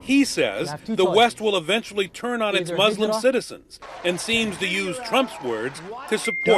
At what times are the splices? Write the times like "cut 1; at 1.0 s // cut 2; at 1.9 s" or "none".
cut 1; at 1.1 s